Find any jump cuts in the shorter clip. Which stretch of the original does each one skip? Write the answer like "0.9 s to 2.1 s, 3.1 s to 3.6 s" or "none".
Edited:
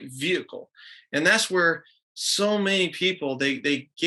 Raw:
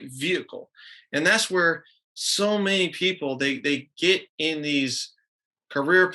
none